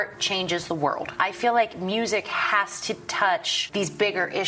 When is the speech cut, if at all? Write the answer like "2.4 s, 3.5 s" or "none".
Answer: 1.1 s, 3.6 s